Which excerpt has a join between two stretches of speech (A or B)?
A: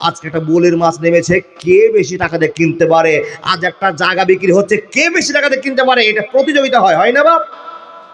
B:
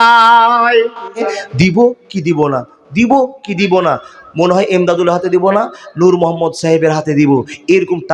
B